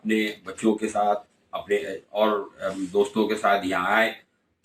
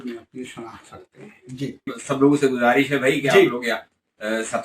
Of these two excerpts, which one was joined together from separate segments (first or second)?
second